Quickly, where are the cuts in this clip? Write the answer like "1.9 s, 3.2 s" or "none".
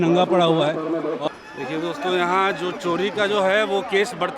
1.3 s